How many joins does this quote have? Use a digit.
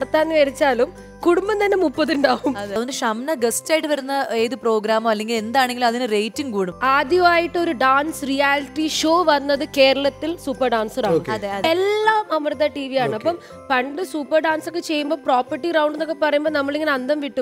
3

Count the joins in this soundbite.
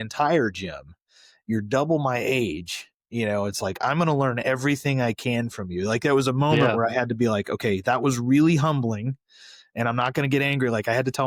0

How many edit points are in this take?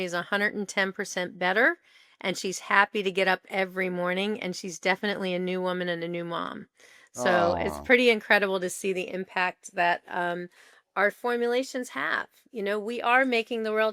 0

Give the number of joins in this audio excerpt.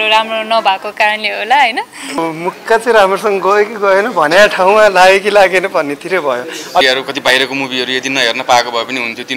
2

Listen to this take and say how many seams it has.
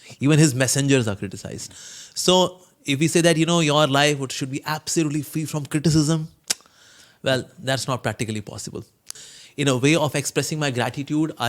1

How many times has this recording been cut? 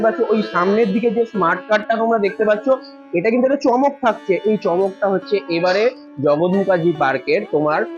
0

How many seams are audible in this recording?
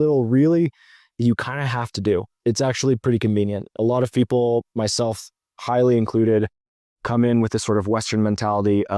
2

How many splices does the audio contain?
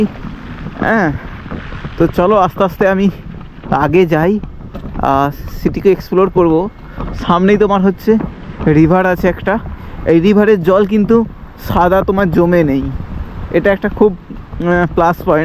0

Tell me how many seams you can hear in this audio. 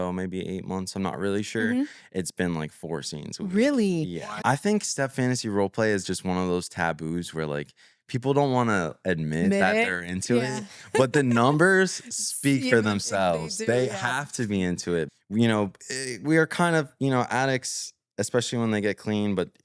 2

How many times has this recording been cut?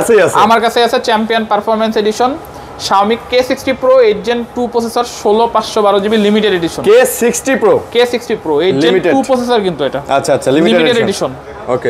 0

